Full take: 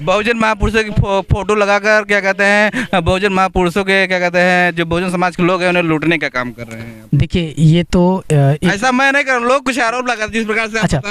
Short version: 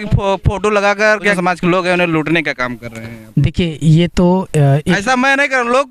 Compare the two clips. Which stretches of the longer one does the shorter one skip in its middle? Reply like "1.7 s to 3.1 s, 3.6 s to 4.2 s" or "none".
2.2 s to 5.1 s